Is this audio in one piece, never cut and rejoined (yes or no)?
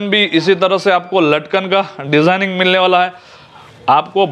yes